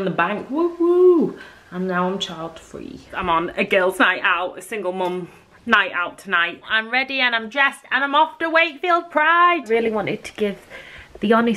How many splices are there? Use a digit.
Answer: 3